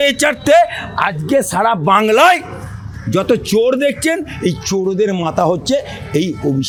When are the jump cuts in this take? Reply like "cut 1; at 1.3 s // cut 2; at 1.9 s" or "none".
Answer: none